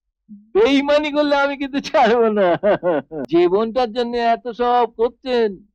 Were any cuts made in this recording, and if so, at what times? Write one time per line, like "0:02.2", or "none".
0:03.2